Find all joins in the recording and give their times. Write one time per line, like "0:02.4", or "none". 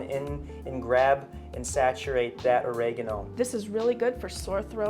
0:03.2